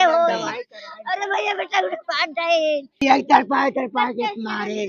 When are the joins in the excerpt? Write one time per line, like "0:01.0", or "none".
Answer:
0:02.9